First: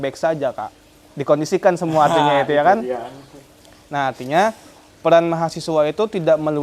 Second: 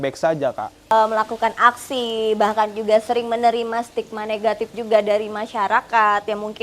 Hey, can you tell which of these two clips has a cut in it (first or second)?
second